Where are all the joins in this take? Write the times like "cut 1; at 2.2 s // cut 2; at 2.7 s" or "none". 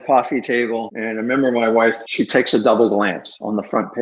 cut 1; at 0.9 s // cut 2; at 2.0 s

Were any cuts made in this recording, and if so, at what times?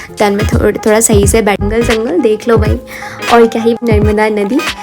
cut 1; at 1.6 s // cut 2; at 3.8 s

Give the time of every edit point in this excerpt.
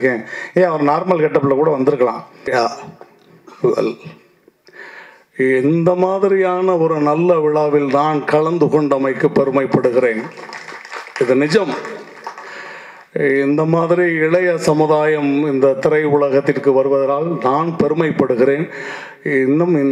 cut 1; at 2.5 s

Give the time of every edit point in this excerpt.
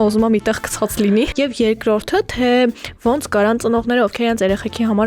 cut 1; at 1.3 s

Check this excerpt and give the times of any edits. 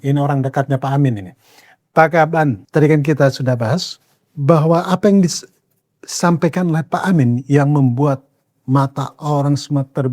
cut 1; at 2.6 s

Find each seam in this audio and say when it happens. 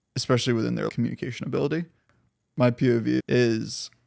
cut 1; at 0.9 s // cut 2; at 3.2 s

